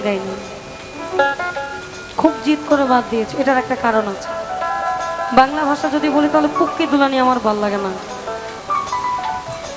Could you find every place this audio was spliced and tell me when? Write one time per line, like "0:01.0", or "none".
none